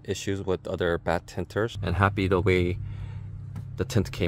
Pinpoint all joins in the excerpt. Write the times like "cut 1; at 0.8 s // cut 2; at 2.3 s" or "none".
cut 1; at 1.8 s